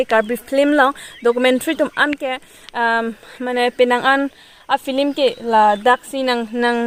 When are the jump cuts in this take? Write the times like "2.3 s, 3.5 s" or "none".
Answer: none